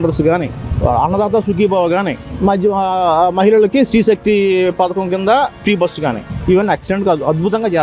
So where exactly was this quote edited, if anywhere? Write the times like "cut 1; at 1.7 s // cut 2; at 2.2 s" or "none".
none